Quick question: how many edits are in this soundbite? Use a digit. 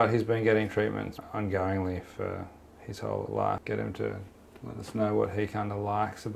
1